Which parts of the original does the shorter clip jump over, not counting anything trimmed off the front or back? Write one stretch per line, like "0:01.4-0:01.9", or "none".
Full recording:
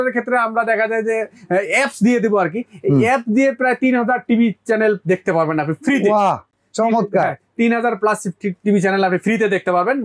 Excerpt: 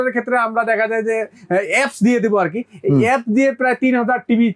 none